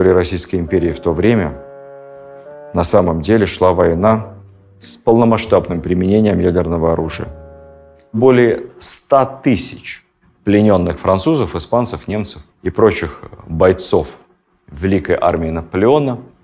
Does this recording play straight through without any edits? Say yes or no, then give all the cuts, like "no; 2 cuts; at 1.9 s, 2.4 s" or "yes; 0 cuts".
no; 1 cut; at 8.2 s